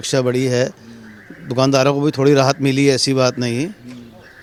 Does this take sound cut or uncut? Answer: uncut